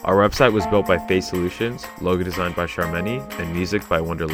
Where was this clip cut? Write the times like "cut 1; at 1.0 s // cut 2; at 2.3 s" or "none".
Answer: none